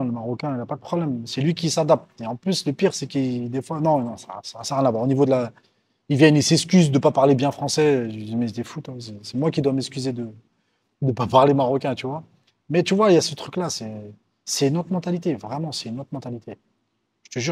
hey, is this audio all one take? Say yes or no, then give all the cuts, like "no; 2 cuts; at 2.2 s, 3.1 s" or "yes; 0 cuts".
yes; 0 cuts